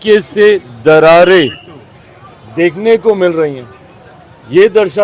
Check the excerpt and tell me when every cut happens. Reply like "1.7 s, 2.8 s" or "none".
none